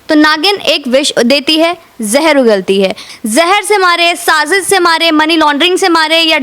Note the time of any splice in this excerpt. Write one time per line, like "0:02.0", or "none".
0:03.1

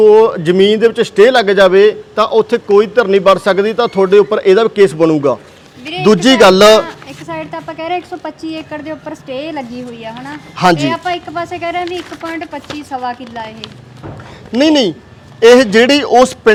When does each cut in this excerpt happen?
none

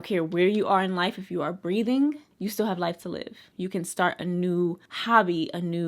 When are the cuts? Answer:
0:03.4

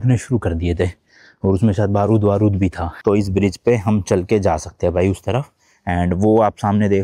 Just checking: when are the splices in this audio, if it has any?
0:02.9

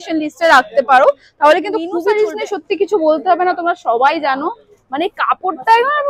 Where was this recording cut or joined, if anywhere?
0:02.0

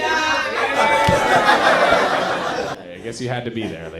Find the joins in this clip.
0:02.8

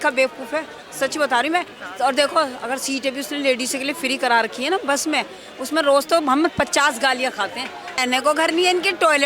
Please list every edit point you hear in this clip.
0:01.8
0:08.0

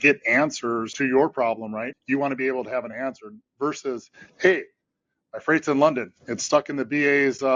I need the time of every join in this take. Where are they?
0:00.9
0:01.9

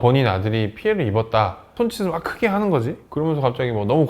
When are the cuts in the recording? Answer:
0:01.7

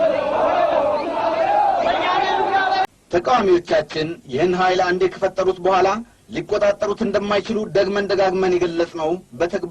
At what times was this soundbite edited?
0:02.9

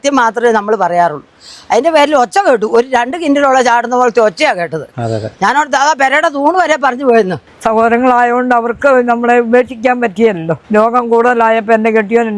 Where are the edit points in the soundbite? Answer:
0:07.5
0:10.5

